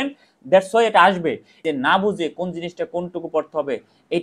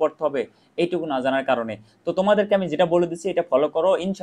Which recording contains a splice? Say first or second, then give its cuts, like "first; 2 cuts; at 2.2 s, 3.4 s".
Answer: first; 1 cut; at 1.5 s